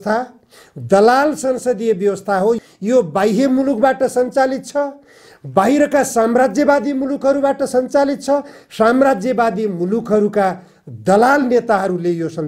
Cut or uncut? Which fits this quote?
cut